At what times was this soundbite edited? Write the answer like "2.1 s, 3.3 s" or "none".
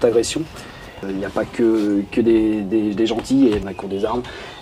1.0 s, 3.7 s